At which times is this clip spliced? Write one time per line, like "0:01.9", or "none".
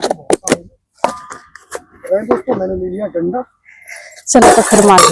0:02.0